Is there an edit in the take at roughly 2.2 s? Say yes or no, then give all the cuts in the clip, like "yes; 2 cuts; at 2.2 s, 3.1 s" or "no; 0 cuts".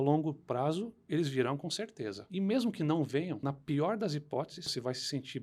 yes; 3 cuts; at 2.2 s, 3.4 s, 4.6 s